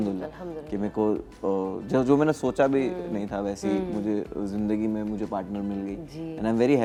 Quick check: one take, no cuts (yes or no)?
yes